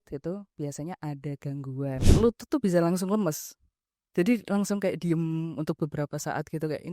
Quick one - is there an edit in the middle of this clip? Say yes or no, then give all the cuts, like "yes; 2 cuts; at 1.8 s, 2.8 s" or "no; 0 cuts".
yes; 1 cut; at 2.0 s